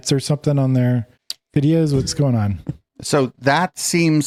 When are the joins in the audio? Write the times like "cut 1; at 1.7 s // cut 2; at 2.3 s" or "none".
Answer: none